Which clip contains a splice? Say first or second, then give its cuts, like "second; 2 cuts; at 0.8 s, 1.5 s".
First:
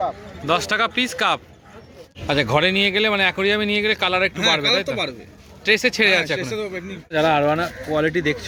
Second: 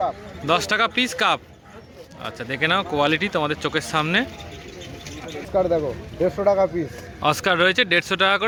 first; 2 cuts; at 2.1 s, 7.1 s